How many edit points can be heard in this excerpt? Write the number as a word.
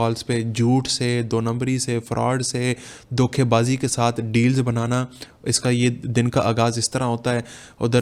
zero